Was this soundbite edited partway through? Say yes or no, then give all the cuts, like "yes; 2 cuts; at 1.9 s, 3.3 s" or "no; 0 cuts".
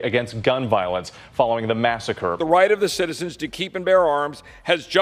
yes; 1 cut; at 2.4 s